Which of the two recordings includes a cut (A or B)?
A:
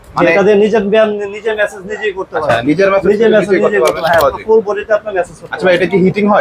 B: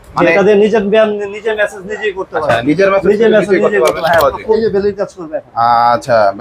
B